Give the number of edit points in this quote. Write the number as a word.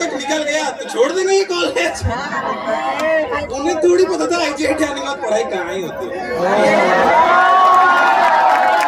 zero